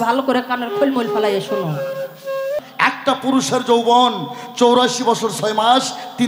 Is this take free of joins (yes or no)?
no